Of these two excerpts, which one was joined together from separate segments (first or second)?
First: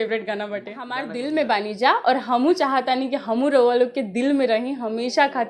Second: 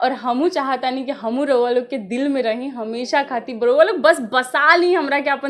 first